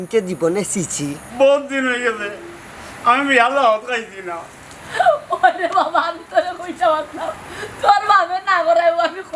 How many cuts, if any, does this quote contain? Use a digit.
1